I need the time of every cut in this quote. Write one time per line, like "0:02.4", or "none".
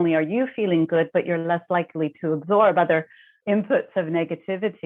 0:03.3

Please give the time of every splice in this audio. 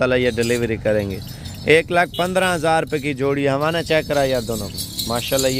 none

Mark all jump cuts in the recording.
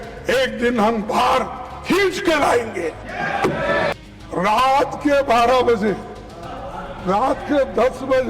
0:03.9

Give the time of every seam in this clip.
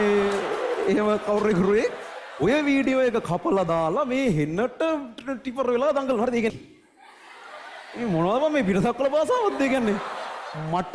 0:06.5

